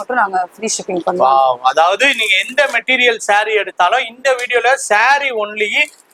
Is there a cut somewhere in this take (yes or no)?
no